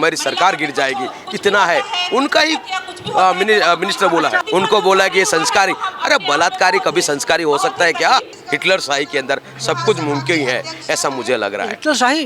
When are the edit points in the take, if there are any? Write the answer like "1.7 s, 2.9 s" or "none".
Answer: 4.4 s, 8.3 s